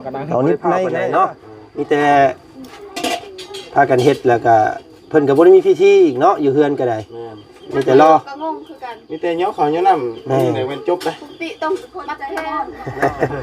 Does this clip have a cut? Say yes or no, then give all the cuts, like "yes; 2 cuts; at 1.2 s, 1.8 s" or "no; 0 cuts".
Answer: yes; 2 cuts; at 0.9 s, 12.4 s